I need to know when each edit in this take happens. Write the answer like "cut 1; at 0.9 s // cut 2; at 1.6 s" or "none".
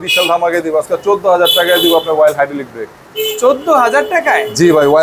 none